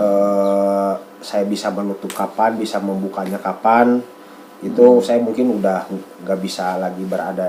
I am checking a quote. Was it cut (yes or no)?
no